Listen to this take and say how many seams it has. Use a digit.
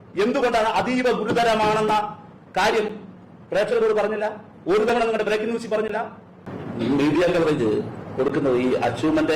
1